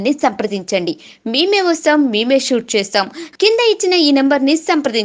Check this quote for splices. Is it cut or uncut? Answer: uncut